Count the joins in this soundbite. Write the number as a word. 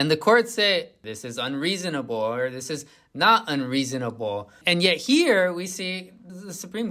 one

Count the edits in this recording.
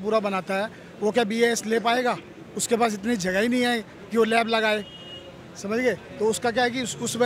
zero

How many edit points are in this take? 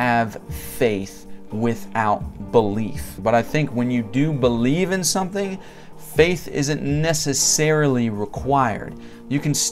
one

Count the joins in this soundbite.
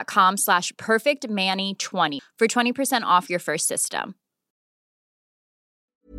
one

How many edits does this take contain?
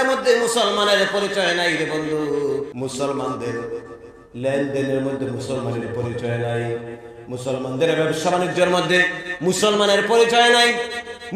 one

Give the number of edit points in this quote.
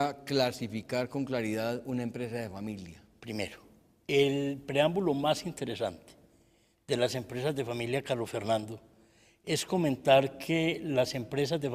one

